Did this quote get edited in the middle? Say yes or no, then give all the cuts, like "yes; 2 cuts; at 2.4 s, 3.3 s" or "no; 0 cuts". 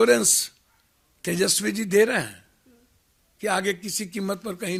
no; 0 cuts